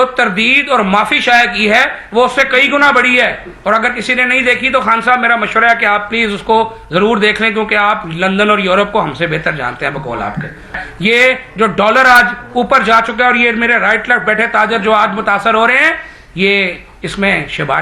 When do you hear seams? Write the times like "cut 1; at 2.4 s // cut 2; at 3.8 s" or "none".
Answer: cut 1; at 10.7 s